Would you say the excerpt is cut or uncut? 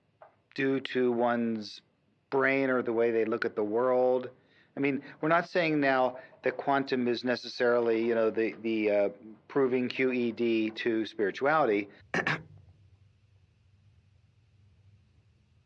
uncut